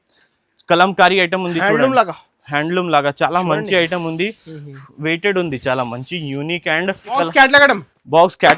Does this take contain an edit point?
yes; 1 cut; at 7.2 s

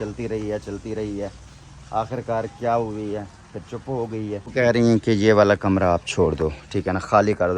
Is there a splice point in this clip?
yes; 1 cut; at 4.5 s

